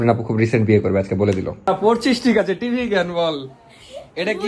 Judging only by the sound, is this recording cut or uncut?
cut